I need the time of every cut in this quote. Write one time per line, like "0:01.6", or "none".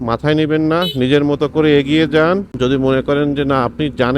0:02.5

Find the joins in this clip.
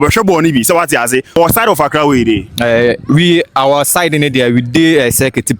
0:01.3

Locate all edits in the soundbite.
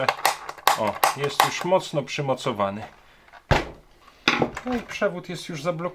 0:04.1

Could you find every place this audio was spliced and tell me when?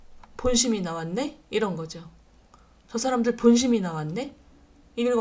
none

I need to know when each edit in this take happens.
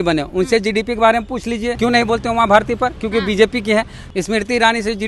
0:01.7
0:04.0

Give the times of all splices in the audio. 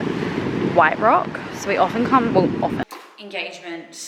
0:02.8

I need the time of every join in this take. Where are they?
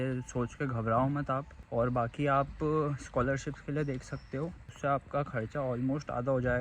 0:01.6
0:04.6

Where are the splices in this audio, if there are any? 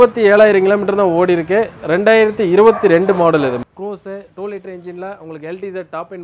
0:01.8
0:03.6

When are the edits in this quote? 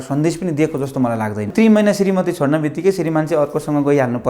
0:01.5

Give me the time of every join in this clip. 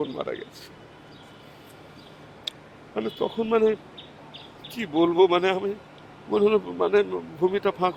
none

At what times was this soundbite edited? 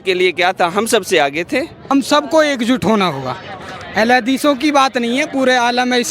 0:01.8

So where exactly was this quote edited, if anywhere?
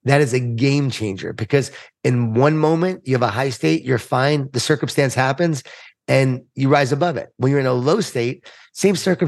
none

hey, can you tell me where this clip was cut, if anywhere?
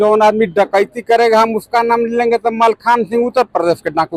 none

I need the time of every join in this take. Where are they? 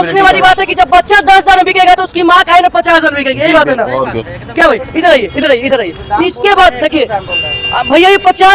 none

